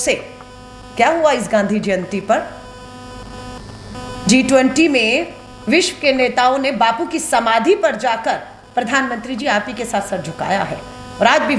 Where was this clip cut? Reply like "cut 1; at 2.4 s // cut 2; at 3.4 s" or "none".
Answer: none